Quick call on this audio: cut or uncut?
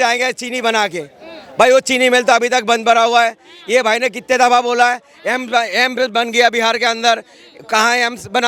uncut